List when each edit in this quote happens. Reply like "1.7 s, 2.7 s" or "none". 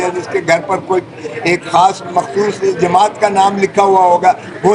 none